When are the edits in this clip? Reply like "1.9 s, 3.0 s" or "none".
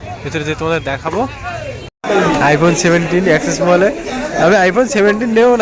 1.9 s